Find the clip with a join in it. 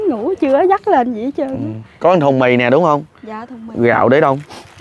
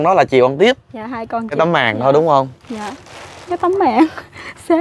second; 1 cut; at 1.6 s

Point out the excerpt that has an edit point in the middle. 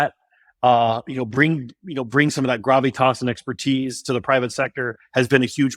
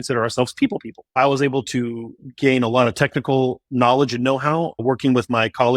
second; 3 cuts; at 1.1 s, 2.2 s, 4.8 s

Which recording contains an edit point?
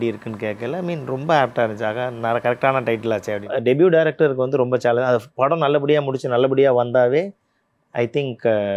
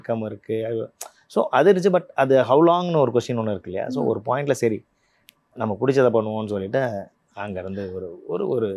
first; 1 cut; at 3.4 s

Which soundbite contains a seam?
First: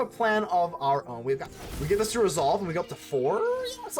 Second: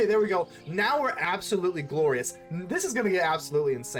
first; 1 cut; at 1.5 s

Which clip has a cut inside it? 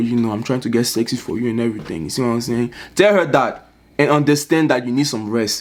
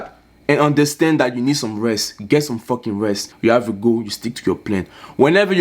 second; 1 cut; at 3.3 s

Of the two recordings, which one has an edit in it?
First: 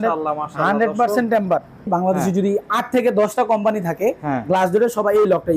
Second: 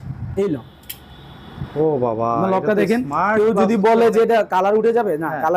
first; 1 cut; at 1.9 s

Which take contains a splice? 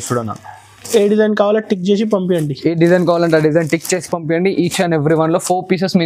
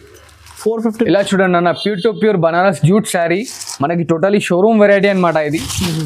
second; 1 cut; at 0.9 s

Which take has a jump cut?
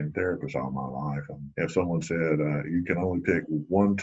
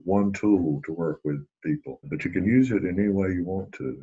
second; 1 cut; at 2.0 s

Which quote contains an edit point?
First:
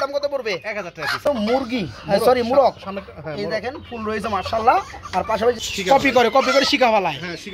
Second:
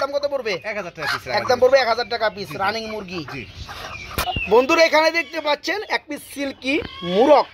first; 2 cuts; at 1.3 s, 5.6 s

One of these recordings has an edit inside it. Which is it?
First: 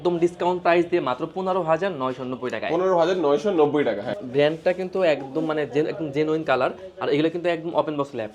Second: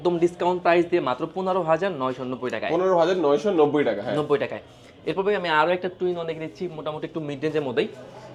first; 1 cut; at 4.1 s

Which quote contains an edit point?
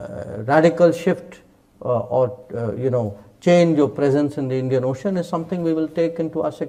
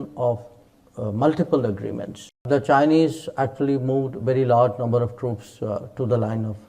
second; 1 cut; at 2.4 s

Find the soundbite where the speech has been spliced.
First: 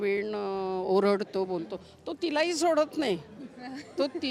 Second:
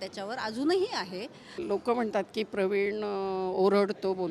second; 1 cut; at 1.6 s

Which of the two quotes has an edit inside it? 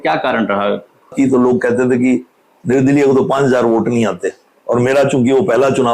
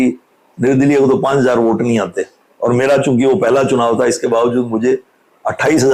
first; 1 cut; at 1.1 s

